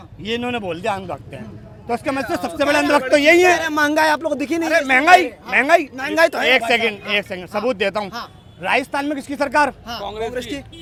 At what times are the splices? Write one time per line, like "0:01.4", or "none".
none